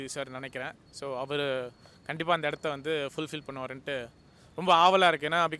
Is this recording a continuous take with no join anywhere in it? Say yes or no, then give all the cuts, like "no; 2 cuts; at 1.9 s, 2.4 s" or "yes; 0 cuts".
yes; 0 cuts